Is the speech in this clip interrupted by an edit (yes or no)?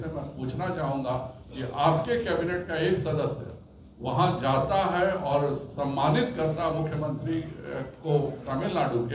no